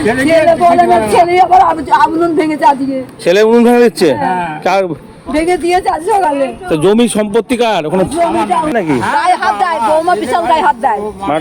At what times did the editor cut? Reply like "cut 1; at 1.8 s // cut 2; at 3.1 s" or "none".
cut 1; at 8.7 s